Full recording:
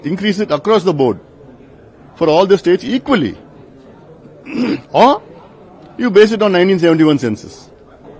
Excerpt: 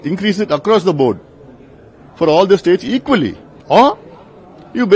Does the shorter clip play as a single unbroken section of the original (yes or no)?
no